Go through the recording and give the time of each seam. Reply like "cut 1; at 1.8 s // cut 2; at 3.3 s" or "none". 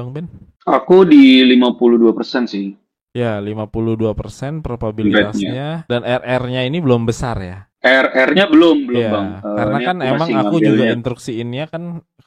none